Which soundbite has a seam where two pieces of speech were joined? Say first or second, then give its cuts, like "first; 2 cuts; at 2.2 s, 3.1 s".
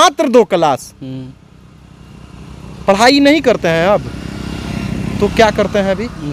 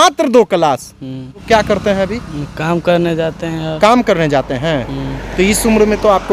second; 1 cut; at 1.4 s